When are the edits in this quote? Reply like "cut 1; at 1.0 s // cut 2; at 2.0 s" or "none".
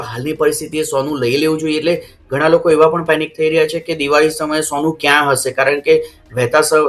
none